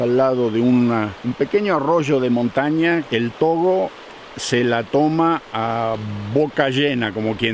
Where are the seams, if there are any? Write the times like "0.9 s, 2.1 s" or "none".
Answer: 1.2 s, 3.0 s